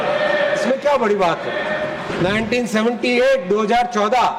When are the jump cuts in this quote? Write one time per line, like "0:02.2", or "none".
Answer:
0:02.1